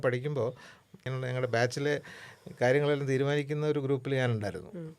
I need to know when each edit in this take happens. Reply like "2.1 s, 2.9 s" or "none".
1.1 s